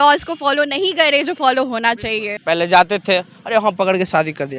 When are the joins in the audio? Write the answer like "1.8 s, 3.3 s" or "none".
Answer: 2.3 s